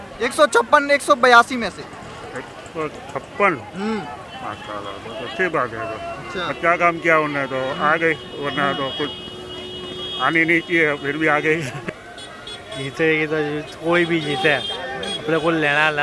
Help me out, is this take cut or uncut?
cut